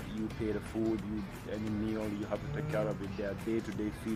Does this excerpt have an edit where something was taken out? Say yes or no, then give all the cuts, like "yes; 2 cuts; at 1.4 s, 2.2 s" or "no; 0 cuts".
no; 0 cuts